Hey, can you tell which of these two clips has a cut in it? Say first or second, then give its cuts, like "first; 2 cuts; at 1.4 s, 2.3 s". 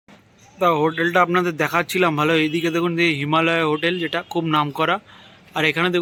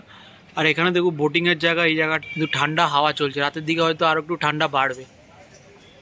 second; 1 cut; at 2.2 s